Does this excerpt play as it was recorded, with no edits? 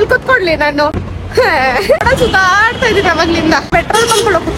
no; 3 cuts; at 1.1 s, 2.0 s, 3.7 s

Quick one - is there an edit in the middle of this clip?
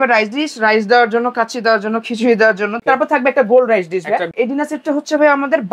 yes; 2 cuts; at 2.7 s, 4.3 s

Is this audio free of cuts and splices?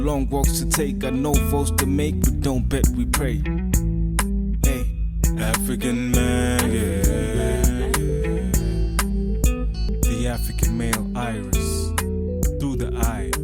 yes; 0 cuts

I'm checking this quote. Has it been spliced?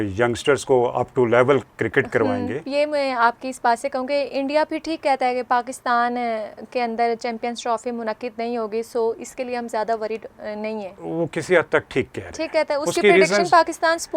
yes; 2 cuts; at 2.7 s, 11.0 s

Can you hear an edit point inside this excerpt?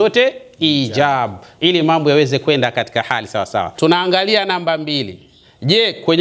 yes; 1 cut; at 3.7 s

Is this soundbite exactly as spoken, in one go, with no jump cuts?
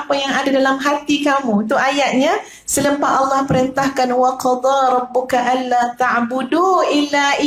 yes; 0 cuts

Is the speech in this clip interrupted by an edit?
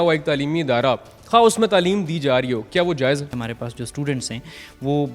yes; 1 cut; at 3.3 s

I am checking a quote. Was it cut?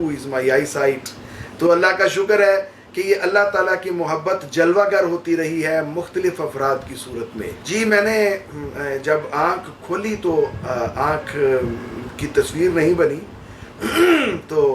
no; 0 cuts

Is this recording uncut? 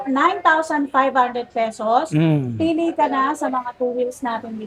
yes; 0 cuts

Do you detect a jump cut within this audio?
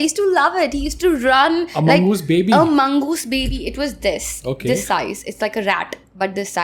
no; 0 cuts

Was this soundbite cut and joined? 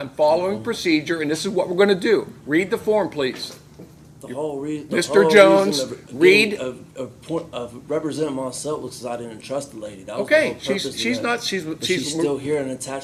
no; 0 cuts

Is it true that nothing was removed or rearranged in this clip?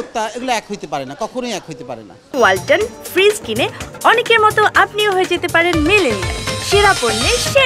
yes; 0 cuts

